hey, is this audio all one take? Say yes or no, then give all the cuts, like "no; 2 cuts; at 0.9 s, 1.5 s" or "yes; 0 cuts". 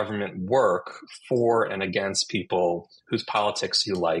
yes; 0 cuts